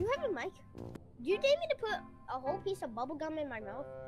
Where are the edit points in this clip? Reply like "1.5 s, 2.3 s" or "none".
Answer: 1.0 s

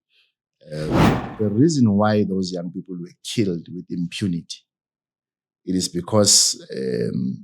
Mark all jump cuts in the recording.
1.2 s

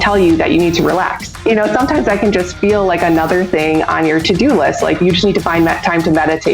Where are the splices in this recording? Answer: 1.4 s, 5.0 s

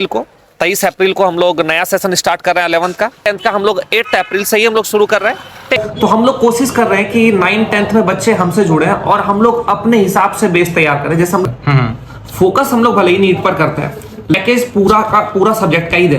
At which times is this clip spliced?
3.3 s, 5.8 s, 11.4 s, 14.3 s

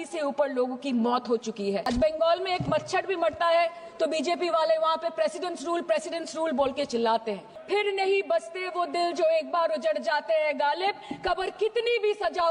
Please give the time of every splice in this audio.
1.9 s, 7.5 s

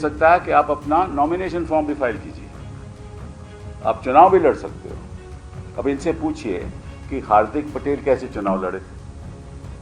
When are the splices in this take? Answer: none

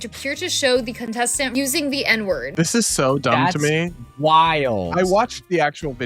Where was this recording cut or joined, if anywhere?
1.5 s, 2.5 s

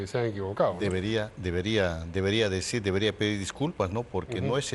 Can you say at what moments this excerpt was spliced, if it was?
none

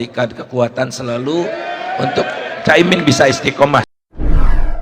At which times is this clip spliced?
3.9 s

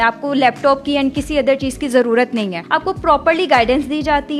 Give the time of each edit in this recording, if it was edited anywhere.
2.6 s

